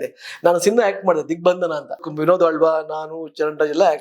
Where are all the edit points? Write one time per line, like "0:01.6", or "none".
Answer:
0:02.1